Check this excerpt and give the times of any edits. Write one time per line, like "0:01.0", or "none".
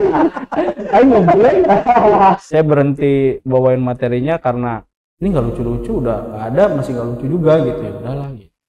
0:02.4